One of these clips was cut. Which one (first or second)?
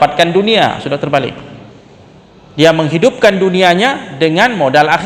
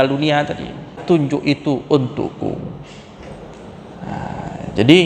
second